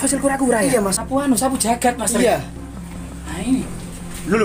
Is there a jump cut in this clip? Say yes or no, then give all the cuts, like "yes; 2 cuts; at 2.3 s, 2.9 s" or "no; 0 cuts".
yes; 1 cut; at 1.1 s